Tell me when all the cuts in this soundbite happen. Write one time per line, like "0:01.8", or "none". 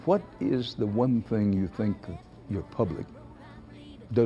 none